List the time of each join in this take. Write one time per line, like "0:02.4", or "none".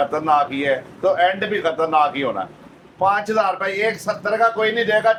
none

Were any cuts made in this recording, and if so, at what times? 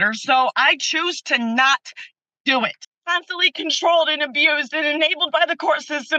0:02.8

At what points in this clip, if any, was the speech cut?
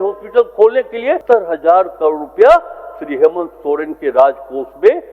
0:01.2

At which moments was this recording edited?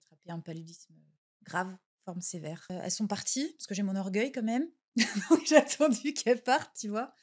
0:02.7

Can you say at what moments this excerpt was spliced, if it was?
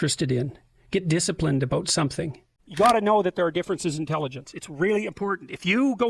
0:02.6

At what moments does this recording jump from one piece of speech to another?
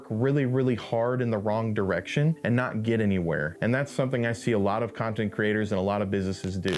0:02.4
0:03.5

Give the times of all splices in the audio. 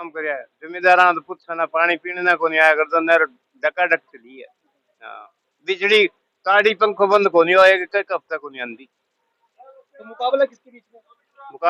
none

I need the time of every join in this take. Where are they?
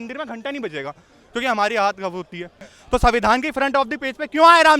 0:02.7

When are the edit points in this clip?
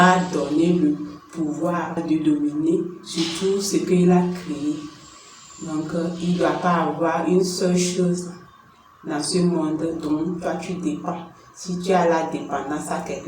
0:02.0

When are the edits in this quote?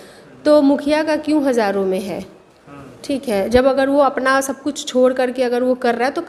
none

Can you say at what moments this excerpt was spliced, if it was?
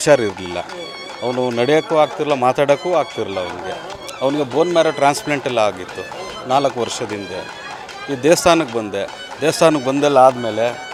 none

